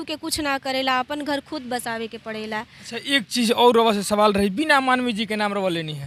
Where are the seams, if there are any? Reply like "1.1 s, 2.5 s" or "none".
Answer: none